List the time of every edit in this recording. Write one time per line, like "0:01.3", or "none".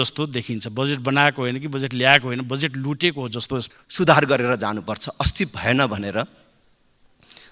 0:03.7